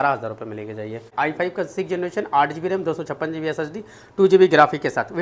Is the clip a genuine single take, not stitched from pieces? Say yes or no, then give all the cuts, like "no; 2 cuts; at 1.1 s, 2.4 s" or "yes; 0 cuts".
no; 1 cut; at 1.0 s